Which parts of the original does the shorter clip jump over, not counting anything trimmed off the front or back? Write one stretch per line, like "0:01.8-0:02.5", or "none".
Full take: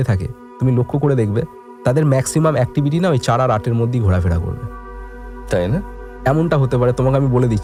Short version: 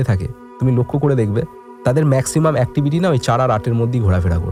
none